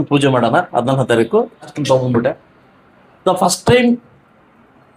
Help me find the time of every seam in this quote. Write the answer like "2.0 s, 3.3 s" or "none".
1.7 s